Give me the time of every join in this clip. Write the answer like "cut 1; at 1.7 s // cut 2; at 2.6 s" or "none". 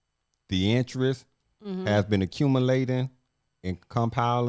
none